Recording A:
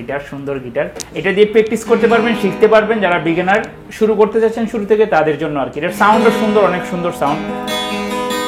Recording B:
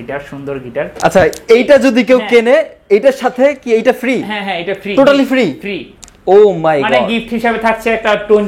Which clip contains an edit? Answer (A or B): B